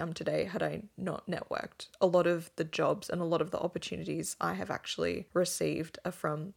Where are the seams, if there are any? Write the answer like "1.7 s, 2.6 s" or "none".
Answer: 0.9 s, 5.2 s